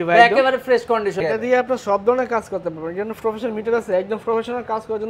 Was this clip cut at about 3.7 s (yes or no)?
no